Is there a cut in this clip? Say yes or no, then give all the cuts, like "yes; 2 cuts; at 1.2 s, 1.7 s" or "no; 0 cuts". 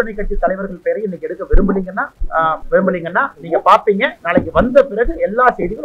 yes; 2 cuts; at 2.5 s, 4.2 s